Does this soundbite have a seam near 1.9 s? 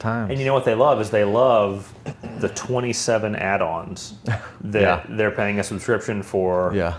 no; 0 cuts

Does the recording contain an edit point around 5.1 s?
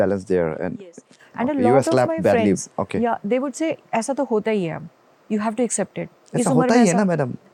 no; 0 cuts

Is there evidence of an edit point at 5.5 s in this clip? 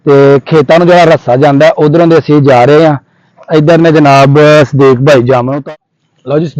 yes; 1 cut; at 5.5 s

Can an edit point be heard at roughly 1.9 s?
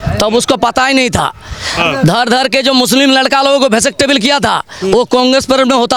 no; 0 cuts

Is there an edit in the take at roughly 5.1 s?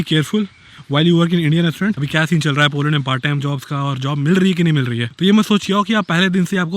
yes; 2 cuts; at 2.0 s, 5.1 s

